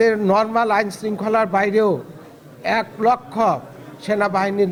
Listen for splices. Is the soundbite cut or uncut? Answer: uncut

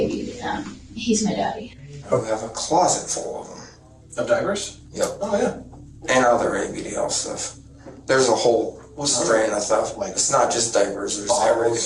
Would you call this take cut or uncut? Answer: cut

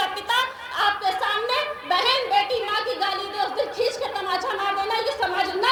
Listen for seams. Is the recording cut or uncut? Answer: uncut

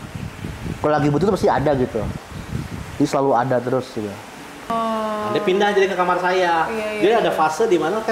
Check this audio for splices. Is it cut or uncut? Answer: cut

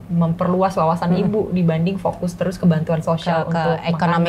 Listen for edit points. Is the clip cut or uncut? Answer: uncut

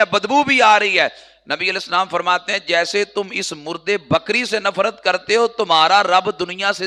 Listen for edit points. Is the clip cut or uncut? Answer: uncut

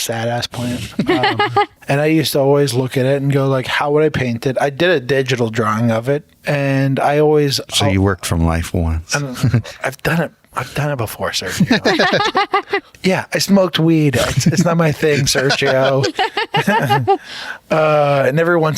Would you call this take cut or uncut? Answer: cut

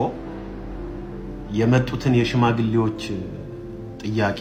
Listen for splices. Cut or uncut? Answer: uncut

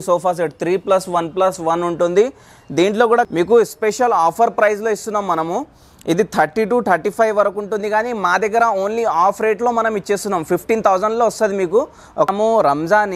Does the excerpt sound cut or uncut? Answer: cut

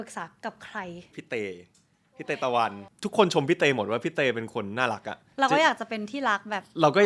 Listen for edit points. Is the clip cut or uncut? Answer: cut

